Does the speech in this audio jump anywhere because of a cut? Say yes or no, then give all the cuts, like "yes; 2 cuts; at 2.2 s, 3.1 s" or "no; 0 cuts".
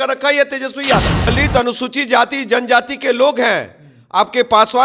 yes; 1 cut; at 1.3 s